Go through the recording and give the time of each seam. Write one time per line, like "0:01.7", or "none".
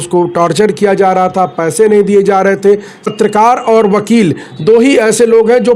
0:03.0